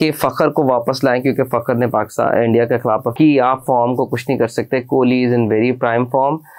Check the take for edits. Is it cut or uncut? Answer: cut